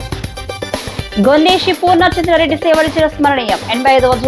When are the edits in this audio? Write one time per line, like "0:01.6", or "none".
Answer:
0:00.9